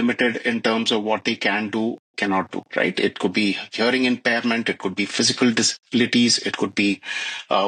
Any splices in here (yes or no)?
no